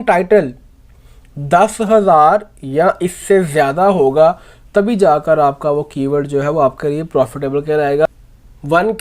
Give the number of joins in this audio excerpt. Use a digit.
1